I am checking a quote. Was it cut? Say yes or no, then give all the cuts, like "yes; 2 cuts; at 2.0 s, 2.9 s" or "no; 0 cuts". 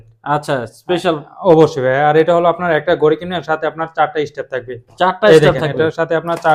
no; 0 cuts